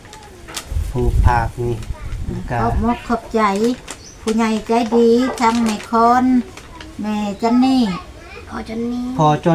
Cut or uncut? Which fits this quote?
uncut